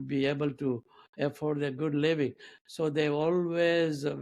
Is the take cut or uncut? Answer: uncut